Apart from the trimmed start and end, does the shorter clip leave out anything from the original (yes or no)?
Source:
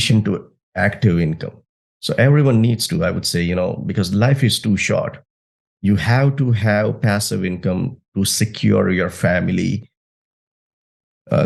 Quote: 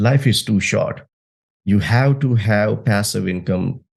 no